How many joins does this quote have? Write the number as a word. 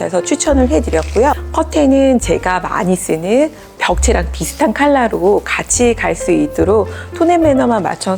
one